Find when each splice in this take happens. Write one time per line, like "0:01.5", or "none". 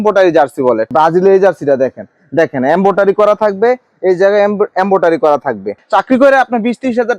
0:00.9
0:05.7